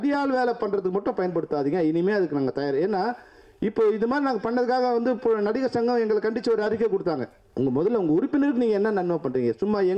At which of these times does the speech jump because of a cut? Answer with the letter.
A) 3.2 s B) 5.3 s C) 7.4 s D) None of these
C